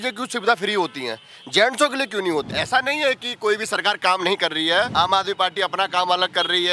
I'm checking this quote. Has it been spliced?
yes; 2 cuts; at 2.5 s, 4.9 s

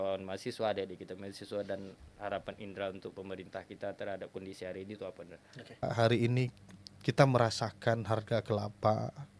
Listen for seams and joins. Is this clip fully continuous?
no; 1 cut; at 5.8 s

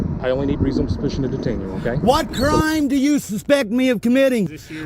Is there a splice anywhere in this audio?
yes; 1 cut; at 2.0 s

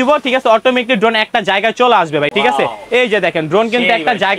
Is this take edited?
no; 0 cuts

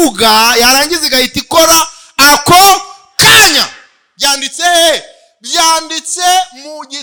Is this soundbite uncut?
yes; 0 cuts

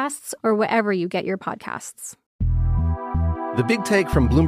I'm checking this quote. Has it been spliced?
yes; 1 cut; at 2.2 s

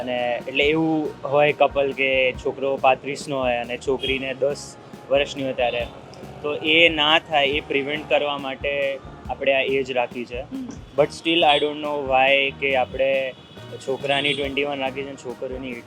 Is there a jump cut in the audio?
no; 0 cuts

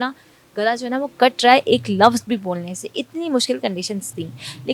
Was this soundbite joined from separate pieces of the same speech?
no; 0 cuts

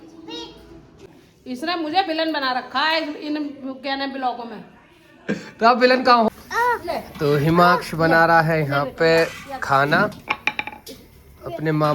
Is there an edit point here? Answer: yes; 2 cuts; at 0.9 s, 6.3 s

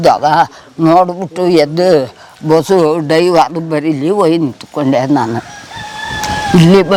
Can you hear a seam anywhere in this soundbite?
no; 0 cuts

